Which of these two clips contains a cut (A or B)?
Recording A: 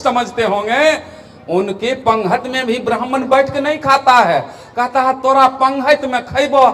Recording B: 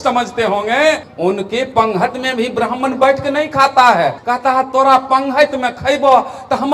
B